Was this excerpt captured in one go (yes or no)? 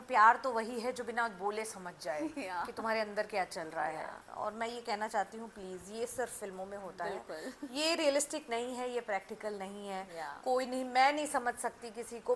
yes